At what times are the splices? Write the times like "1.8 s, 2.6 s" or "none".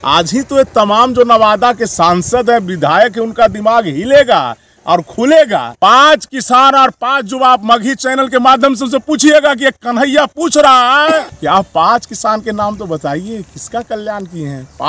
5.7 s, 11.3 s